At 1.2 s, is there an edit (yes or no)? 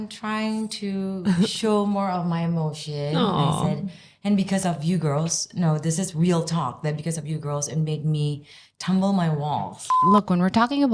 no